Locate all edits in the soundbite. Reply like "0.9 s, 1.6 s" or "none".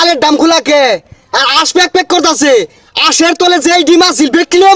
none